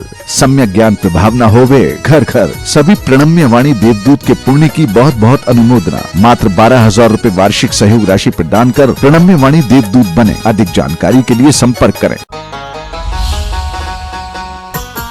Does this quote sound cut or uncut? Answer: cut